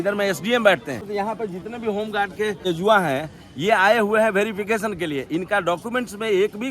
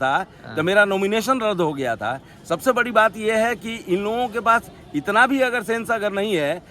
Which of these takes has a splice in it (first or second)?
first